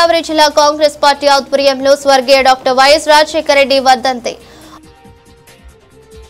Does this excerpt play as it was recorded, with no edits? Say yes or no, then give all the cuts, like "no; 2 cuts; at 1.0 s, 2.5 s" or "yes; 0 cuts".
no; 1 cut; at 4.4 s